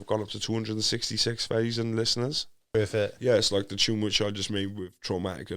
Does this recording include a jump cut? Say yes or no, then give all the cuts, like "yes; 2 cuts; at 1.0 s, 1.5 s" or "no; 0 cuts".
yes; 1 cut; at 2.7 s